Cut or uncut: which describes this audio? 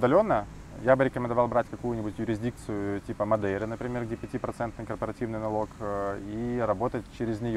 uncut